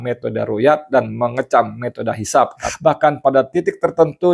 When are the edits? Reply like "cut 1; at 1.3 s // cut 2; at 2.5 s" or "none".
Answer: cut 1; at 2.7 s